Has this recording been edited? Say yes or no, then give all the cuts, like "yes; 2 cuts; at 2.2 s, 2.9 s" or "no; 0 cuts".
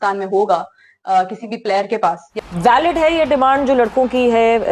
yes; 1 cut; at 2.3 s